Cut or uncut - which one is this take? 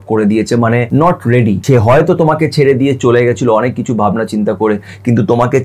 cut